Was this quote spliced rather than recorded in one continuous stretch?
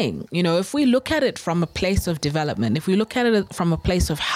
no; 0 cuts

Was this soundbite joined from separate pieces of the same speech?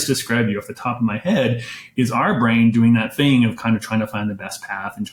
no; 0 cuts

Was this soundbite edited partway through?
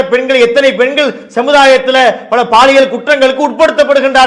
no; 0 cuts

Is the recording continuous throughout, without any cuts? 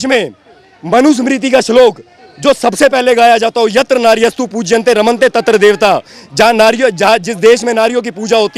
yes; 0 cuts

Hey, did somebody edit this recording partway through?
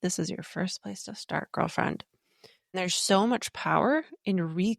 yes; 1 cut; at 2.7 s

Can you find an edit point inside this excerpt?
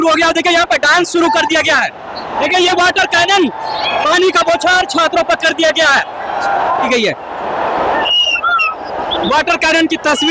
yes; 2 cuts; at 2.1 s, 6.7 s

